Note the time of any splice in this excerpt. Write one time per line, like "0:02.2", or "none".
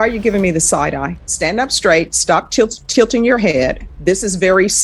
0:01.2
0:03.9